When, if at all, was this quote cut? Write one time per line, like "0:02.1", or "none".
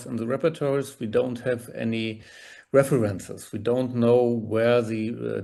none